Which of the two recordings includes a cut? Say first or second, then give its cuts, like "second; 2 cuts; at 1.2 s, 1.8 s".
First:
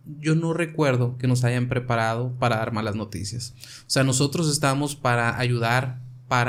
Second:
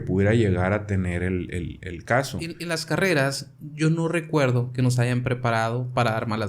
second; 1 cut; at 2.6 s